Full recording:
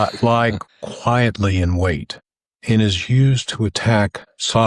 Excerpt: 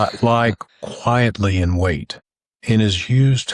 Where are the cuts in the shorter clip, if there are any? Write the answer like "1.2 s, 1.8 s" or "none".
none